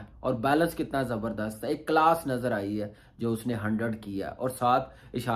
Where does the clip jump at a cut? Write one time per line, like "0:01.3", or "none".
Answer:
none